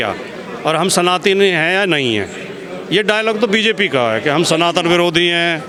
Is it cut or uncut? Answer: uncut